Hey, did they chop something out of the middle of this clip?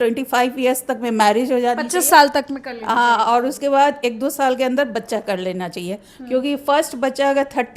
no; 0 cuts

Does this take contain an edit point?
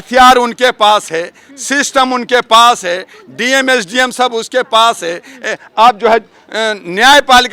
no; 0 cuts

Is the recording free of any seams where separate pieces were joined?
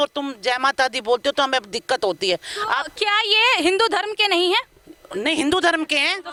yes; 0 cuts

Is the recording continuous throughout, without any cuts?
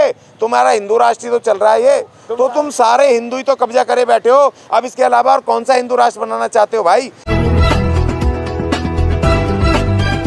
no; 2 cuts; at 2.2 s, 7.2 s

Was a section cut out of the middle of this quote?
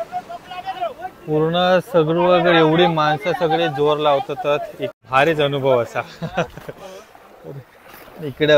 yes; 1 cut; at 4.8 s

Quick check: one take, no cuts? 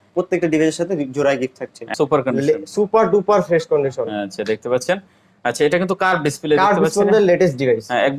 no; 1 cut; at 1.9 s

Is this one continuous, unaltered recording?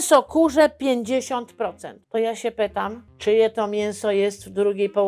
no; 2 cuts; at 1.9 s, 3.1 s

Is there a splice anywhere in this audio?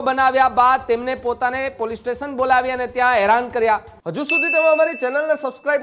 yes; 1 cut; at 4.0 s

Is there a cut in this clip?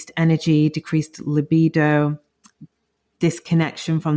no; 0 cuts

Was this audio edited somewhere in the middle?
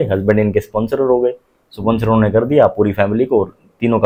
no; 0 cuts

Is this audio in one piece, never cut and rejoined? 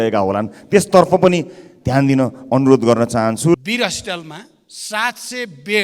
no; 1 cut; at 3.6 s

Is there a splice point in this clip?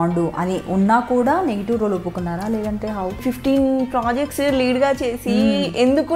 yes; 1 cut; at 3.2 s

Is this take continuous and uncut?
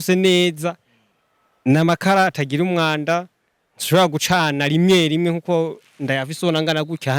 yes; 0 cuts

